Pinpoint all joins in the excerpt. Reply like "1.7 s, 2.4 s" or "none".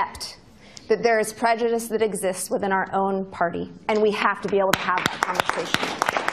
none